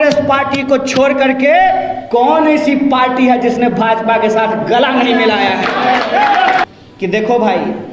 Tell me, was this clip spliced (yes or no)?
yes